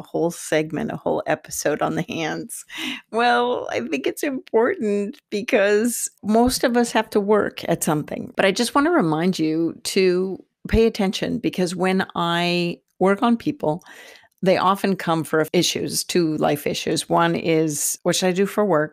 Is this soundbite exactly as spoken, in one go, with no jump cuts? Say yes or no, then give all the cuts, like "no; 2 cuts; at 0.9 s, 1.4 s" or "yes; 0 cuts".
no; 2 cuts; at 6.1 s, 8.2 s